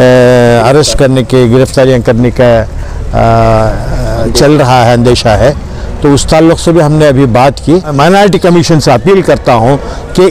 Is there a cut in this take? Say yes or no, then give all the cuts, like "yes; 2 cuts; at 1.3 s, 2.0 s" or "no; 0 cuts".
yes; 1 cut; at 7.9 s